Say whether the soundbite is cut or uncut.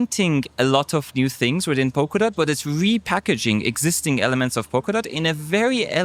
uncut